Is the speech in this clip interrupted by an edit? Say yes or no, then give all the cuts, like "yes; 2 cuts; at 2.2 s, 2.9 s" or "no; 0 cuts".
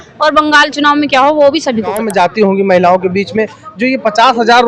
yes; 1 cut; at 2.0 s